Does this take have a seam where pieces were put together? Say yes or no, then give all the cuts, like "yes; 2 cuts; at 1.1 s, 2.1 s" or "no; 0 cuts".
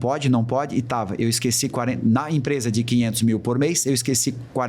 no; 0 cuts